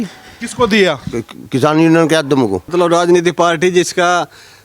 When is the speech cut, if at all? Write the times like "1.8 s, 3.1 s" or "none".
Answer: 2.7 s